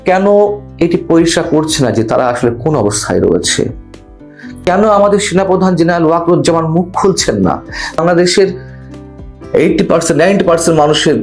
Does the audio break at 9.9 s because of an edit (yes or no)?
no